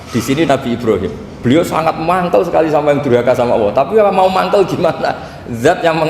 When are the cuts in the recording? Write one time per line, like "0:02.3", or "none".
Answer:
0:01.2